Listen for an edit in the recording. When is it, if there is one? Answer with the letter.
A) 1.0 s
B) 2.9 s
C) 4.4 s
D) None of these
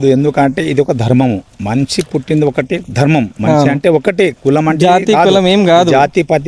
D